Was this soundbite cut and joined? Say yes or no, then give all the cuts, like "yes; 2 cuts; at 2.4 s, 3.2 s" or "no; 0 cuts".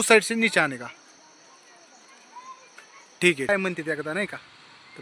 yes; 1 cut; at 3.5 s